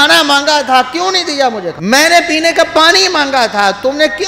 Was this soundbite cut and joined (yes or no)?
yes